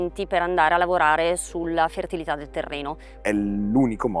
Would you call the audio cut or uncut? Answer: cut